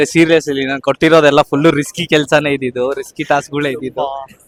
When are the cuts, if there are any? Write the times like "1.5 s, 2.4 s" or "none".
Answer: none